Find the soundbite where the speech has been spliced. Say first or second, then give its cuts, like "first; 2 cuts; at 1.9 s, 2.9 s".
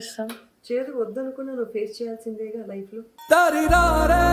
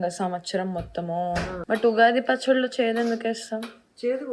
second; 1 cut; at 1.6 s